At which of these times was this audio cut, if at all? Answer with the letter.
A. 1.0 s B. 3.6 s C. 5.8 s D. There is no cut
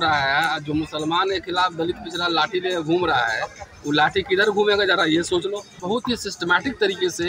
C